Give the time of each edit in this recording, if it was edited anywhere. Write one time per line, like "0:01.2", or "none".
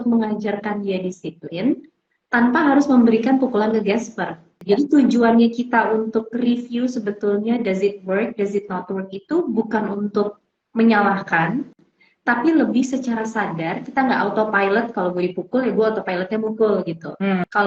0:04.5